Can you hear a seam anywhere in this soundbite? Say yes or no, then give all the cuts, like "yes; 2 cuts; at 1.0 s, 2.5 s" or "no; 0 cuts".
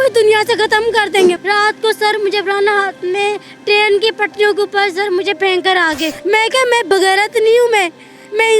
yes; 2 cuts; at 1.4 s, 6.1 s